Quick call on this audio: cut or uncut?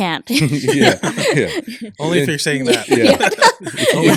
uncut